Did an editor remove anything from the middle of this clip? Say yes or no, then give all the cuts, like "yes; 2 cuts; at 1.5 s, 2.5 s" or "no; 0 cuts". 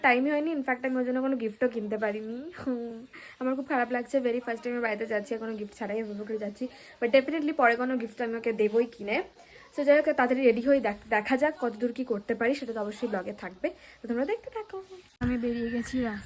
no; 0 cuts